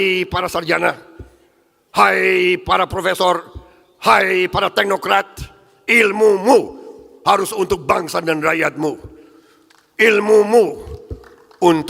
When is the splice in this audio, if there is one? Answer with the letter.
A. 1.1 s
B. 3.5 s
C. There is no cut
C